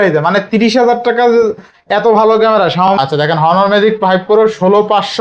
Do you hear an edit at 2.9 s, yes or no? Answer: yes